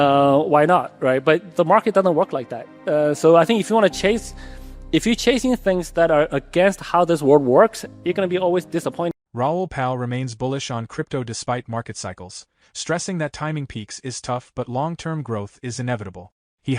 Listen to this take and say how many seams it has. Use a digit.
1